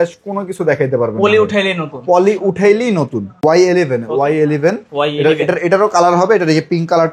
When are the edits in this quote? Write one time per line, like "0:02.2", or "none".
0:03.4

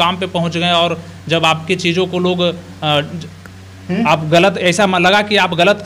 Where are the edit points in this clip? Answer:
none

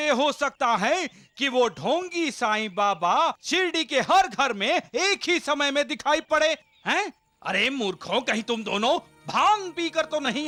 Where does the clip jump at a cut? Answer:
none

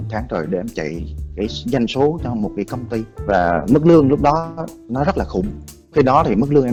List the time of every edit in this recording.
none

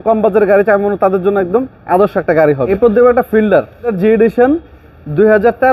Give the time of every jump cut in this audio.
0:02.7
0:03.9

